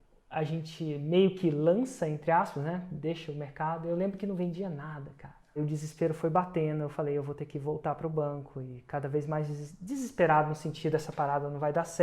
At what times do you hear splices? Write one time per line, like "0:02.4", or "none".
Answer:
0:05.6